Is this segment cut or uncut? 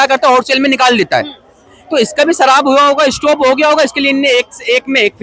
uncut